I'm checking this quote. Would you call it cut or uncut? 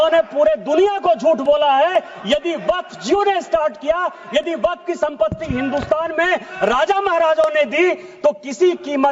uncut